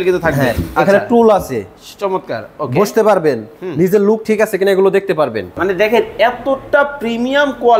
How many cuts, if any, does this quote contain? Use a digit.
1